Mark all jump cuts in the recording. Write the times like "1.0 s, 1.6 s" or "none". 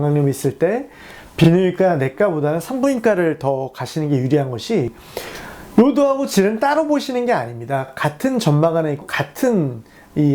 none

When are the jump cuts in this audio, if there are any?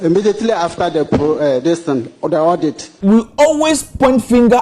2.9 s

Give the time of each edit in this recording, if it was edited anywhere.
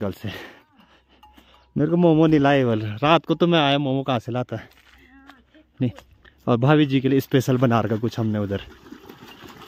none

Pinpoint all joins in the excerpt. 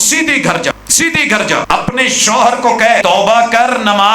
0.7 s, 1.7 s, 3.0 s

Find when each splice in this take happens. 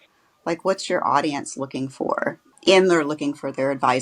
2.4 s

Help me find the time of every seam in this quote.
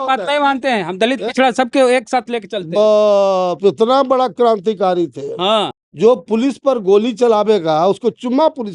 5.7 s

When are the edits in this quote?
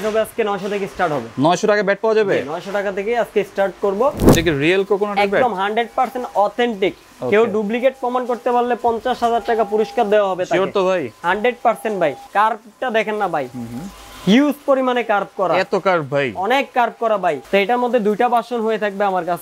4.3 s, 12.2 s, 17.4 s

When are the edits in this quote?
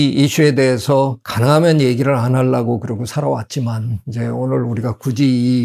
none

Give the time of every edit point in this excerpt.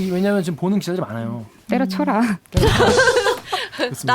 none

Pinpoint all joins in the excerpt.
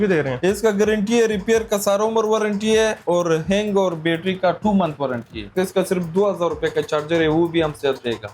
5.5 s

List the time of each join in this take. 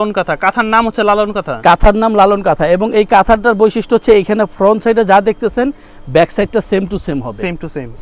none

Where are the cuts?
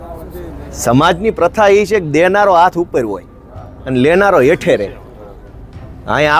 none

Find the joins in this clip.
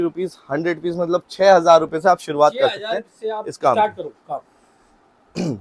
none

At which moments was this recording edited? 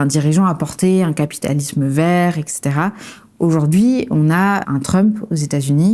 4.6 s

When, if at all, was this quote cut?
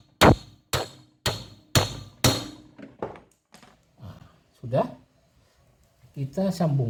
none

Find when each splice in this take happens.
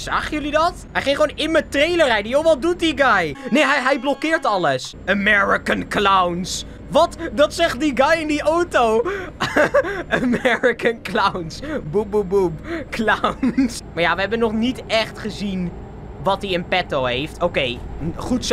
0.9 s, 3.4 s, 4.9 s, 13.8 s

